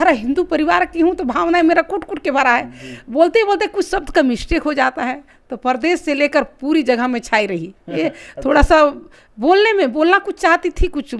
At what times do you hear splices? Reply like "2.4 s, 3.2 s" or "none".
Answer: none